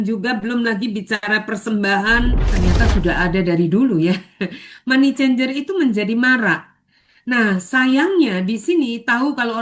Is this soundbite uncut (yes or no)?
no